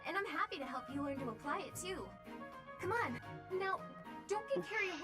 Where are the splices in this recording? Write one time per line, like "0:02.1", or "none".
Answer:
0:03.2